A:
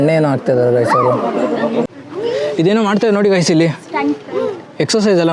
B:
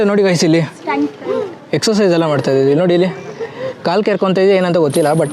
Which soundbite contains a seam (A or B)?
A